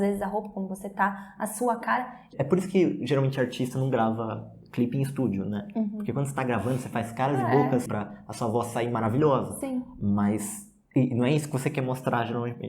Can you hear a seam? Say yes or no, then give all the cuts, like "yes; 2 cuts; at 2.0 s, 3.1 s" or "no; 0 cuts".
yes; 2 cuts; at 2.3 s, 7.9 s